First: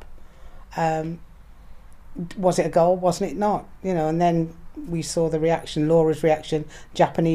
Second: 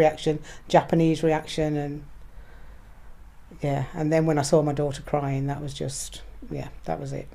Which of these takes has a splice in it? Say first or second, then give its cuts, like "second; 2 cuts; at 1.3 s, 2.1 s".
second; 1 cut; at 6.0 s